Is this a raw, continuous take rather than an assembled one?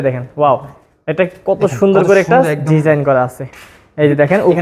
yes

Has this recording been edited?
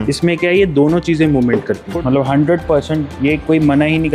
yes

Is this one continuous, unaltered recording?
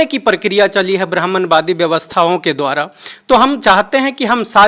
yes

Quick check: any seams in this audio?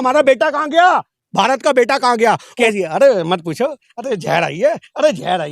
yes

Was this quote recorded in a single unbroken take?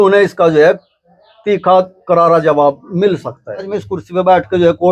no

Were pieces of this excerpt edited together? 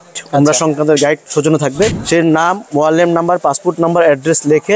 yes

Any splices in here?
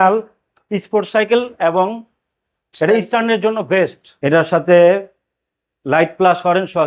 yes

